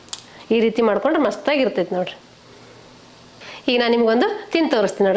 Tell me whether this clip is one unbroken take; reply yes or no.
no